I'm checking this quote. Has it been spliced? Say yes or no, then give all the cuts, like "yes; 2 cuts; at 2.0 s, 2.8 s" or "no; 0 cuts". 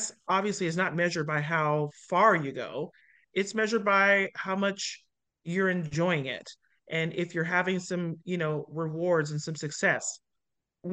no; 0 cuts